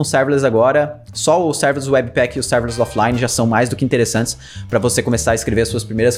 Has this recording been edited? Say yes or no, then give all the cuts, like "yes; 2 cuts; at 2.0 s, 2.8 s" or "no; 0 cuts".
no; 0 cuts